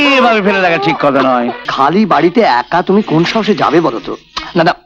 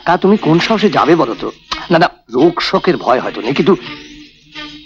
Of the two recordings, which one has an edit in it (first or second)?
first